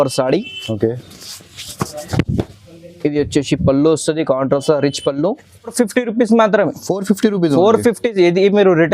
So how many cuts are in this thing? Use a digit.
1